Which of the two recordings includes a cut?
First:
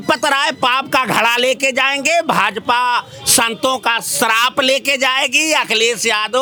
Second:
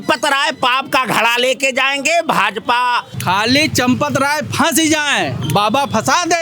second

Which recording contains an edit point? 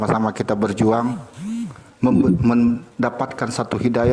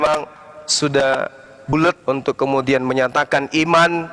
second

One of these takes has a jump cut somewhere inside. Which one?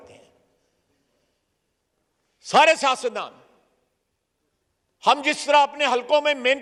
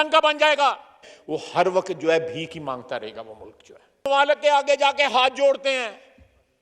second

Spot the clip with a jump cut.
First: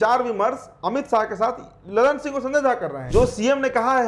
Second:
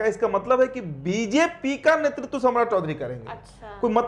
first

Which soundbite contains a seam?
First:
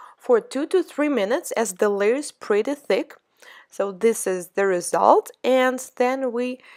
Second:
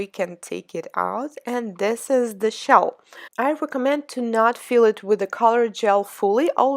second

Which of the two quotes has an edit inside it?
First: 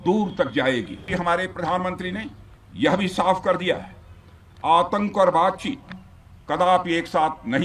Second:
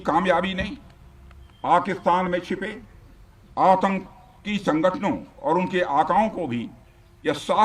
first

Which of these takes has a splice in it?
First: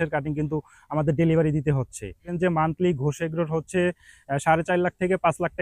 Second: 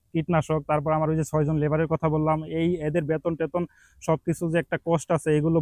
first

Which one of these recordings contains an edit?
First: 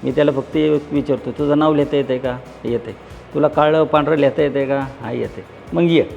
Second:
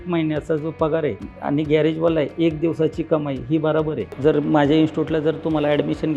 second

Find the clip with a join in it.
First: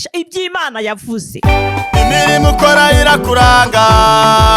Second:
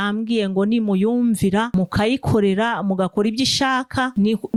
first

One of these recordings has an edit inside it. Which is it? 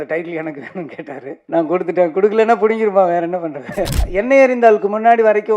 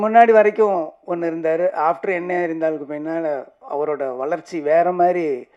first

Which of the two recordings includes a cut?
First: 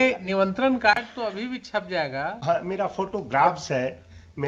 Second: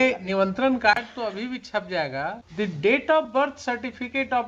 second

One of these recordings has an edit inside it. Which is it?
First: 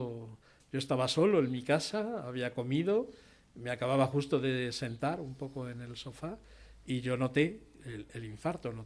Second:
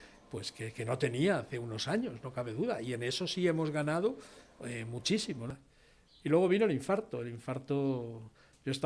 second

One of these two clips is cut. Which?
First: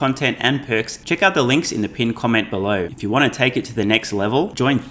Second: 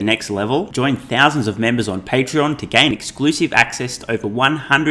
first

